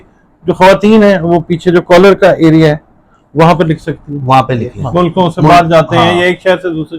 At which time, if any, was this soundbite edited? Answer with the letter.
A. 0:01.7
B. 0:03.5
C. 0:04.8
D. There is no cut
C